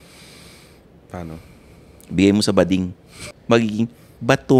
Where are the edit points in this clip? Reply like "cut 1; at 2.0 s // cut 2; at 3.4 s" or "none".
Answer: cut 1; at 3.2 s